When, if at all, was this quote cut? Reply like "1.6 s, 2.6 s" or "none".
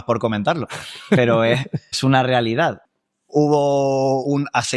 1.9 s, 2.8 s